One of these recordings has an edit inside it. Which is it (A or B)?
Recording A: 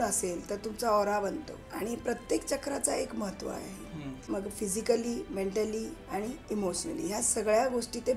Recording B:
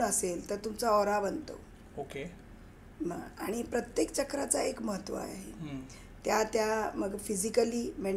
A